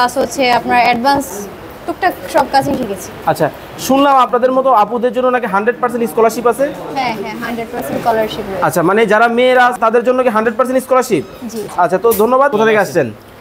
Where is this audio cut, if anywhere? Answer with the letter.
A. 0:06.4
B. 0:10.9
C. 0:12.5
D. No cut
C